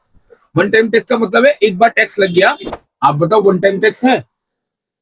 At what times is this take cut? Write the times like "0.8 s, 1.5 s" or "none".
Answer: 2.7 s